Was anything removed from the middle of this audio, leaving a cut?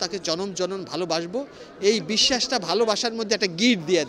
no; 0 cuts

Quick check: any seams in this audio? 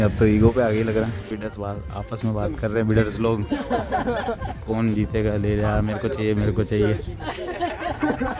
no; 0 cuts

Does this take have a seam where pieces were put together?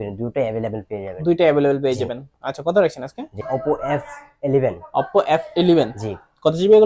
yes; 1 cut; at 3.4 s

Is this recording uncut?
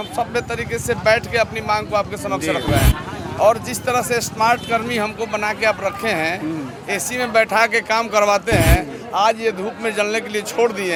yes; 0 cuts

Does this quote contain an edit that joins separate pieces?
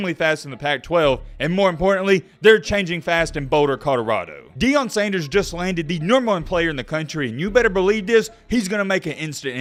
no; 0 cuts

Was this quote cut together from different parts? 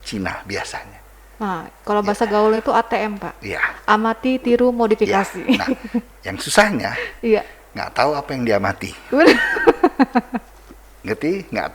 no; 0 cuts

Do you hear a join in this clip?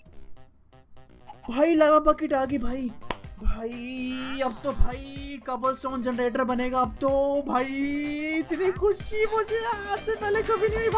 no; 0 cuts

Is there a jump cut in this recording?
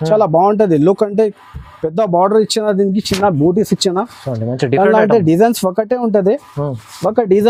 no; 0 cuts

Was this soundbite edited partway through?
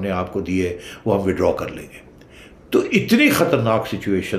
no; 0 cuts

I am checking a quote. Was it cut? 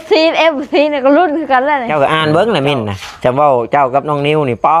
yes; 1 cut; at 1.9 s

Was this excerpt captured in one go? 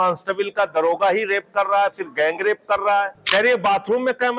no; 1 cut; at 3.2 s

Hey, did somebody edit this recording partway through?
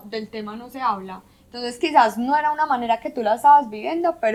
no; 0 cuts

